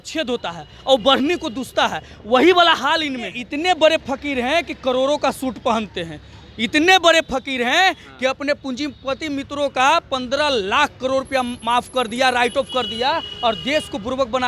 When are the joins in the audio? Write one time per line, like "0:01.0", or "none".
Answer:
0:03.4